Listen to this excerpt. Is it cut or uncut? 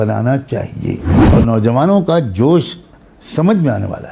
cut